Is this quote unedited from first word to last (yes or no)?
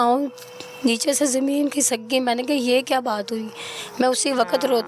yes